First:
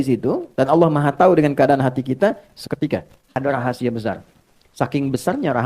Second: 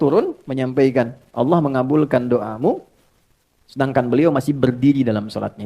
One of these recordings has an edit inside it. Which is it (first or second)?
first